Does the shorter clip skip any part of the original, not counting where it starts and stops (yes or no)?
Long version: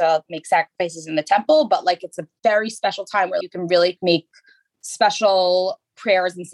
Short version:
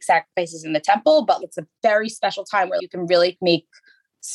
yes